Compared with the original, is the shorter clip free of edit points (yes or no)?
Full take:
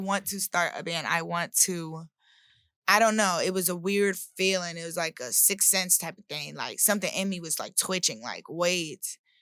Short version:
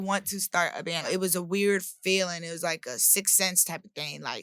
no